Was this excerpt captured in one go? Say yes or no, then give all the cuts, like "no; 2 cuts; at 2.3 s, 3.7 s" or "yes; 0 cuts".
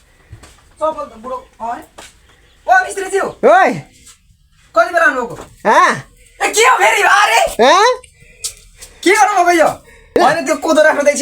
no; 1 cut; at 10.2 s